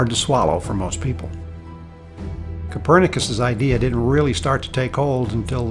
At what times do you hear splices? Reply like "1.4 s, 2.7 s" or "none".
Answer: none